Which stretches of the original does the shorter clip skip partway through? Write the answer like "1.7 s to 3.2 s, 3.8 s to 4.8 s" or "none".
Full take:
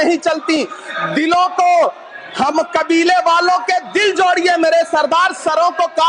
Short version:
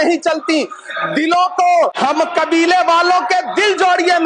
2.0 s to 2.3 s